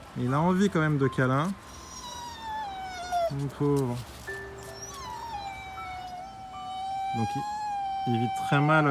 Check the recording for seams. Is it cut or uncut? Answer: uncut